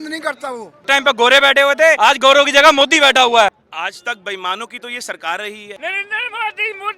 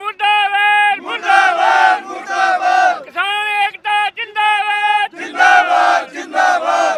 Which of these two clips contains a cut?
first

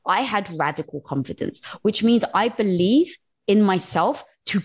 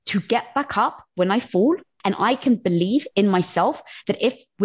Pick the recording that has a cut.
second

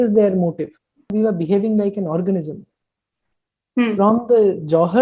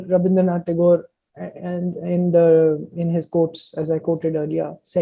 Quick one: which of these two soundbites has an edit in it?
first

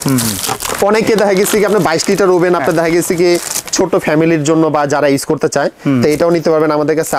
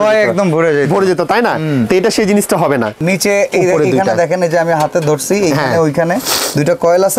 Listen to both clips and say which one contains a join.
second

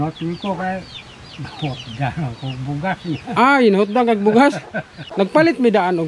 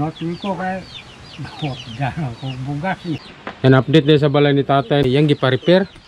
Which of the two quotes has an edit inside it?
second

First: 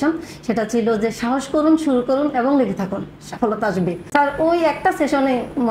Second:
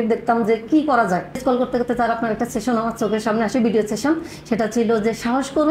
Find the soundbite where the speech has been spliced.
second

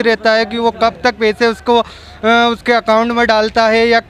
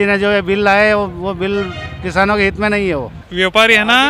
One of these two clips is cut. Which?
second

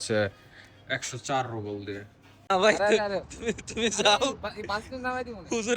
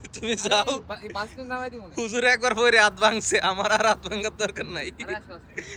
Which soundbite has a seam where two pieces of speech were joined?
first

